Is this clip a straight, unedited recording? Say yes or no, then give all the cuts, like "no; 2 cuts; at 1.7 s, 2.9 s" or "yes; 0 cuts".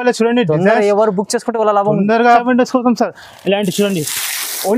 no; 1 cut; at 2.4 s